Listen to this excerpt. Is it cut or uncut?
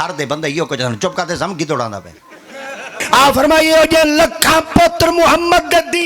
cut